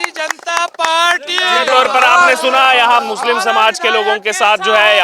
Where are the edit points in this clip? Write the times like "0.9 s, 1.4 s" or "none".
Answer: none